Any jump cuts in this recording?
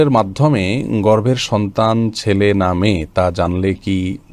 no; 0 cuts

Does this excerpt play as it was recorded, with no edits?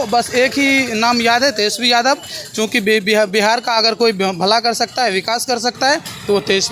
yes; 0 cuts

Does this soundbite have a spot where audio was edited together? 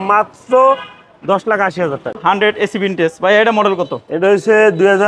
yes; 1 cut; at 2.2 s

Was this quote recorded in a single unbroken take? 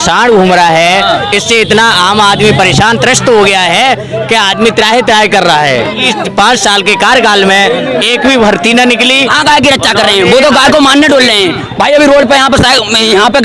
no; 2 cuts; at 6.1 s, 9.3 s

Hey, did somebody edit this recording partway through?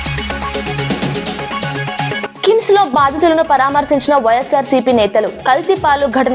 yes; 1 cut; at 1.8 s

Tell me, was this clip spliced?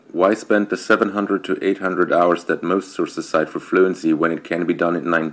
no; 0 cuts

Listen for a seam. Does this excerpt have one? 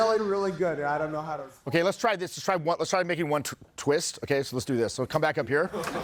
no; 0 cuts

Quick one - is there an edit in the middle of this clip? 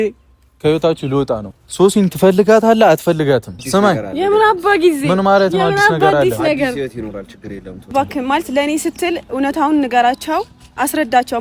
yes; 3 cuts; at 1.5 s, 3.6 s, 7.9 s

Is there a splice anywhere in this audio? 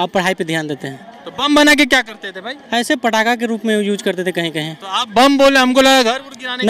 no; 0 cuts

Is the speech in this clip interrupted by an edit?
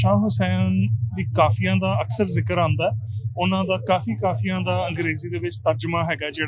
no; 0 cuts

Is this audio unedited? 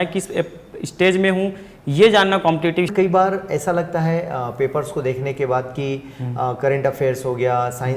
no; 1 cut; at 2.9 s

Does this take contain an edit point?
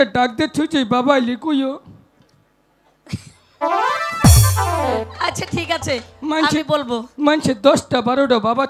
no; 0 cuts

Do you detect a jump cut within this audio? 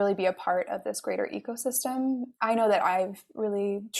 no; 0 cuts

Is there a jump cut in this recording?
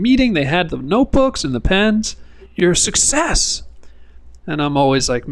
yes; 1 cut; at 2.5 s

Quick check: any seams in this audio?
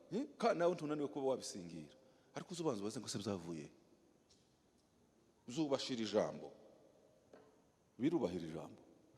no; 0 cuts

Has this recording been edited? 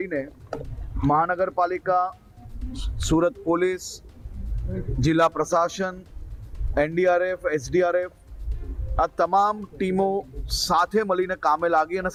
no; 0 cuts

